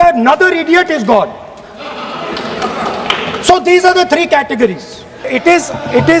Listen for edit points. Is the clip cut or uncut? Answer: cut